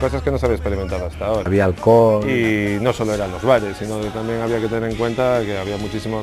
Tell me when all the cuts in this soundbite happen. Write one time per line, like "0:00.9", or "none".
0:01.5
0:02.3